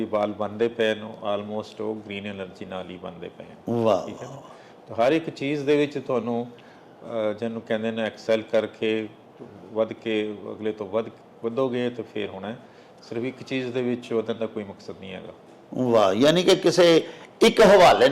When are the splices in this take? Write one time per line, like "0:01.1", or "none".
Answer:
none